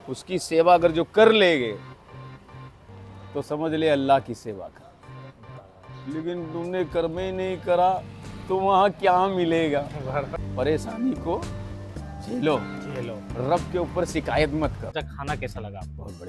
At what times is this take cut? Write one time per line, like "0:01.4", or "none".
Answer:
0:10.3
0:14.9